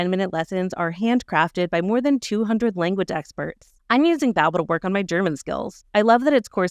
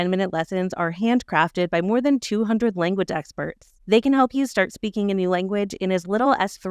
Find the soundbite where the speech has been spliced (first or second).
first